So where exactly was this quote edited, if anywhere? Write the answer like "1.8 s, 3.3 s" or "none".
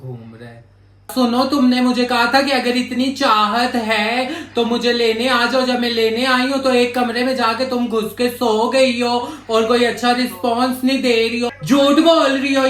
1.1 s, 11.5 s